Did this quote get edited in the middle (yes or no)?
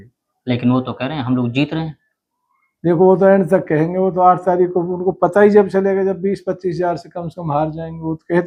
no